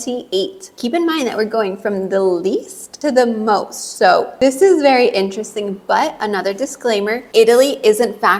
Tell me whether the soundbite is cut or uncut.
uncut